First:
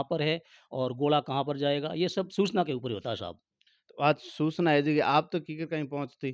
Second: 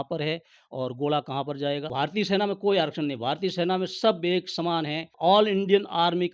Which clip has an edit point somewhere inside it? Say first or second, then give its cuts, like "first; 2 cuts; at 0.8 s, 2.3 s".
second; 2 cuts; at 1.9 s, 5.1 s